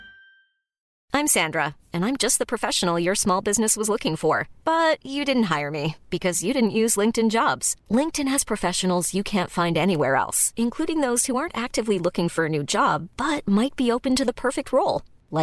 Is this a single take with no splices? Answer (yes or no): no